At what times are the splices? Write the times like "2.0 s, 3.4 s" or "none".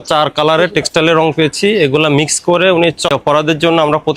3.1 s